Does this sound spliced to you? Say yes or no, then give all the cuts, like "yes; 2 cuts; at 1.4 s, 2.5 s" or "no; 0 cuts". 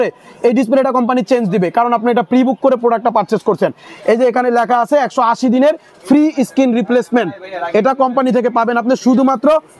no; 0 cuts